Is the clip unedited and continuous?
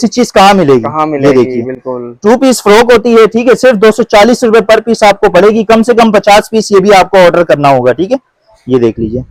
yes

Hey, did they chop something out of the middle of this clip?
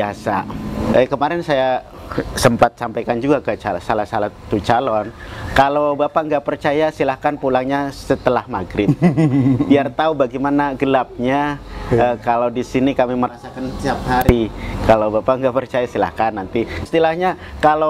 yes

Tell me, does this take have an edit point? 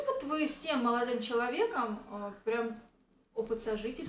no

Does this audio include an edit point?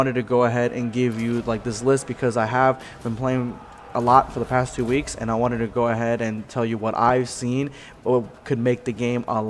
no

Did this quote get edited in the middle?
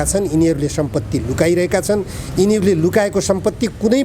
no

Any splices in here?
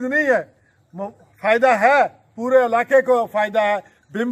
no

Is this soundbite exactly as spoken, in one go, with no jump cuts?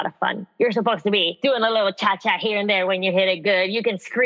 no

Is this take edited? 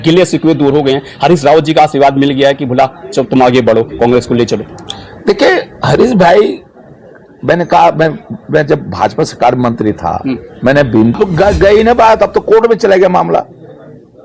yes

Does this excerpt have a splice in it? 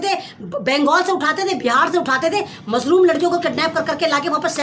no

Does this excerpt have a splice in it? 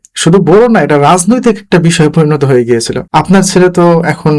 yes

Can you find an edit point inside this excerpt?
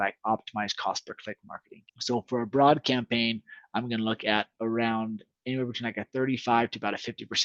no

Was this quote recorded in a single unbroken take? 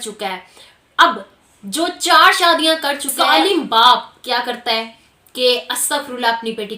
no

